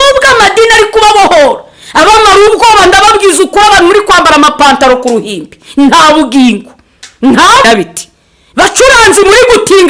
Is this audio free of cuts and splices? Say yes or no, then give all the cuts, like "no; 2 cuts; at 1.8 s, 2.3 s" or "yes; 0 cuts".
no; 1 cut; at 7.6 s